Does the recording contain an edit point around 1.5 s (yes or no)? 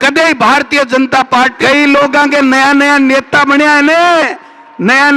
yes